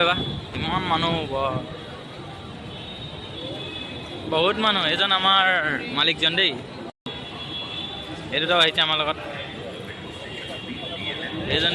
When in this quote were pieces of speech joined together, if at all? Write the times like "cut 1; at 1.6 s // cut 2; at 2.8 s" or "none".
cut 1; at 6.9 s